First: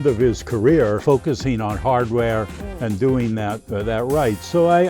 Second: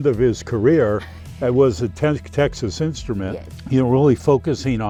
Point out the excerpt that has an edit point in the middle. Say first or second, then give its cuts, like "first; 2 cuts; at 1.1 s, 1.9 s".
first; 1 cut; at 1.0 s